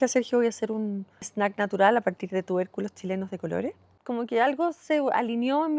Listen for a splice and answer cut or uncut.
cut